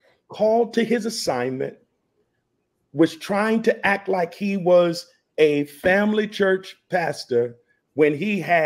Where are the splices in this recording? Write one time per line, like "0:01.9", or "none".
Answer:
none